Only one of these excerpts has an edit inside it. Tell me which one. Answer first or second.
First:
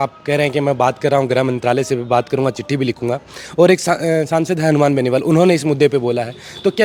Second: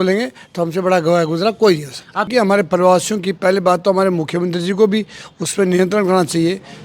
second